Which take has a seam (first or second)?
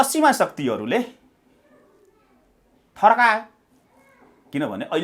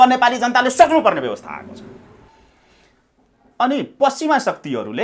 second